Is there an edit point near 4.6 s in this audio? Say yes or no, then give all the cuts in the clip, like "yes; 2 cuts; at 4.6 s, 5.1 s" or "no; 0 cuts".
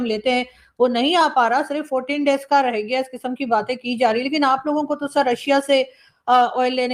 no; 0 cuts